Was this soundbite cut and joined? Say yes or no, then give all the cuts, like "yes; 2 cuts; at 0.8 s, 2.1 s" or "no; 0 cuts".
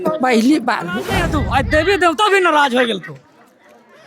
yes; 1 cut; at 1.2 s